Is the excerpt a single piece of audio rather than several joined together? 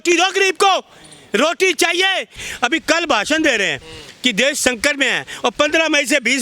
no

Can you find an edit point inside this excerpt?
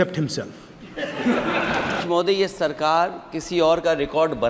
yes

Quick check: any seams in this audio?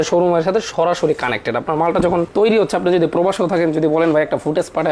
no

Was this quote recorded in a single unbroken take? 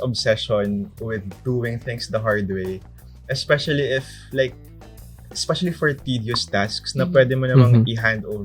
yes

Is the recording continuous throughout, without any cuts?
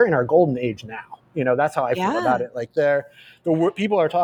yes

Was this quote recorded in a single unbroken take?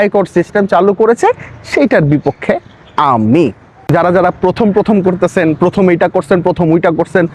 no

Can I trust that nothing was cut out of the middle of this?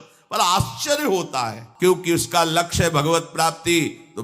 no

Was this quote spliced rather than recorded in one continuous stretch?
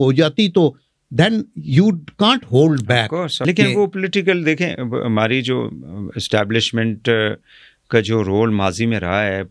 yes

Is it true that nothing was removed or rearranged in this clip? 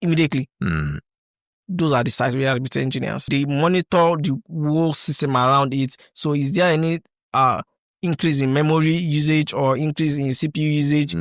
no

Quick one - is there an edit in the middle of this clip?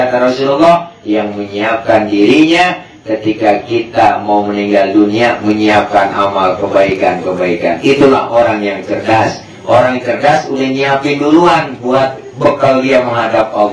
no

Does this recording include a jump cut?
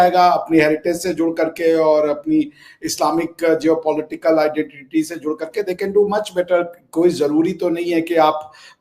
no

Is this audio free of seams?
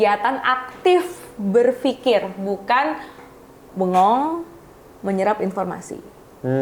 yes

